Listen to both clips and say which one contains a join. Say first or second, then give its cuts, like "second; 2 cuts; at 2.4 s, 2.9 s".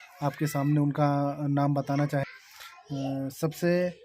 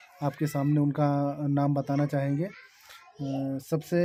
first; 1 cut; at 2.3 s